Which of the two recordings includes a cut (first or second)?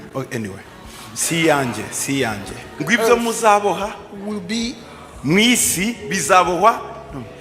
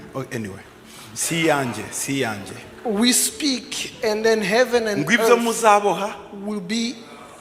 first